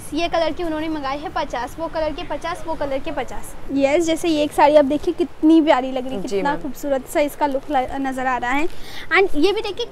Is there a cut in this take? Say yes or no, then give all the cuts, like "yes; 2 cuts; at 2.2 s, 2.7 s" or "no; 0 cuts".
yes; 1 cut; at 3.5 s